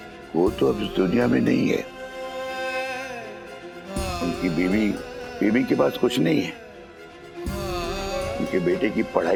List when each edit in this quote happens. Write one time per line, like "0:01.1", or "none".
none